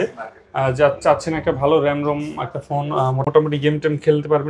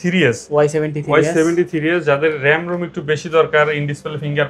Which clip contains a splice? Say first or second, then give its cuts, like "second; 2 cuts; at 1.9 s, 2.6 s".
first; 1 cut; at 3.2 s